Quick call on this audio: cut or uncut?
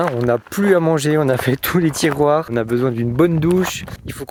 uncut